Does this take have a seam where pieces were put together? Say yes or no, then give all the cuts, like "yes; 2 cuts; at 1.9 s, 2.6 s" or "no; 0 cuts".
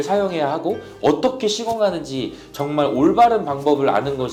no; 0 cuts